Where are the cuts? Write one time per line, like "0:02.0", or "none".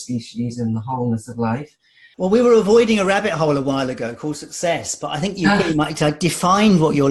0:02.0